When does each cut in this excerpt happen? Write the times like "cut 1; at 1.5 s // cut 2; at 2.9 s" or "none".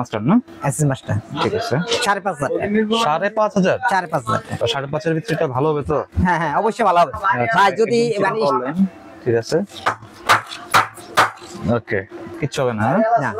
cut 1; at 4.6 s // cut 2; at 12.2 s